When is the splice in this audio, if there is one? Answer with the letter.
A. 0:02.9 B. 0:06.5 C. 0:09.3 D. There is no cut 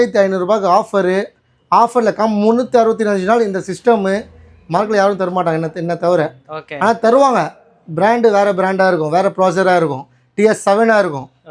D